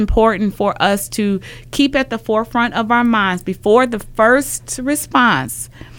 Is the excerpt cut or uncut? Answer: uncut